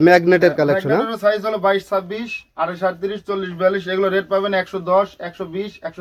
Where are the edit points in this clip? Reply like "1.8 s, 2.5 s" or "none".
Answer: none